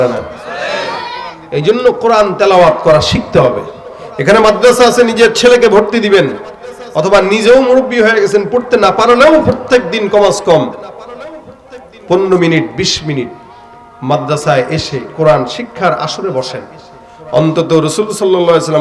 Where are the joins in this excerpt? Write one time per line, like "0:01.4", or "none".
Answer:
none